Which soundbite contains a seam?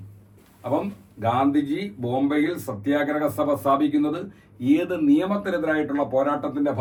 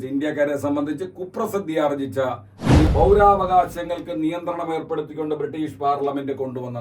second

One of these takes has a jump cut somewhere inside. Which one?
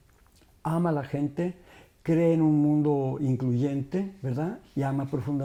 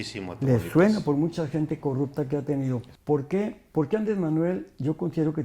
second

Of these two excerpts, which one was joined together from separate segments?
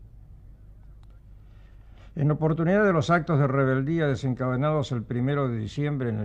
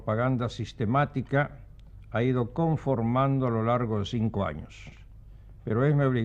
first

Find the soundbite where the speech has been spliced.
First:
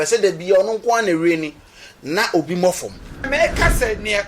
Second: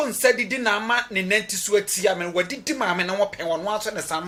first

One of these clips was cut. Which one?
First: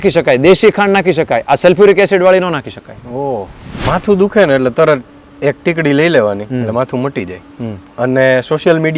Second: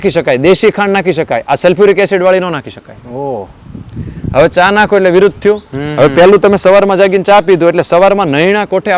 first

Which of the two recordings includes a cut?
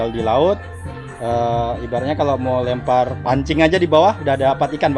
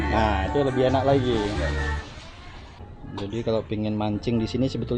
second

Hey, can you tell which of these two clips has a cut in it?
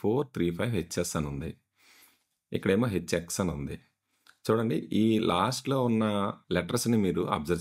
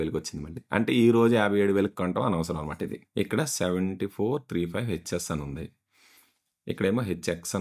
second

